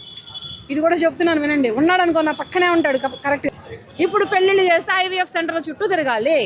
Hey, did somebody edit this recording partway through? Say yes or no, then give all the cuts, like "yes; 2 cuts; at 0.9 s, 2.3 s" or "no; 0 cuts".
yes; 1 cut; at 3.4 s